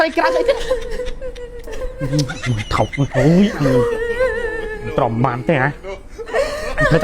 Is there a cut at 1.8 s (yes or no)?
yes